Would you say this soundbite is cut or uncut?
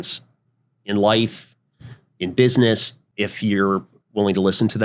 cut